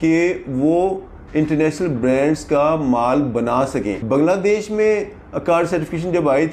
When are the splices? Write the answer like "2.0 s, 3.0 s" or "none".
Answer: 4.0 s